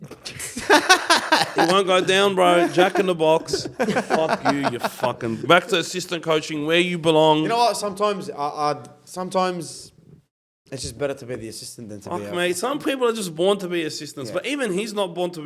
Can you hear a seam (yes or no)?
no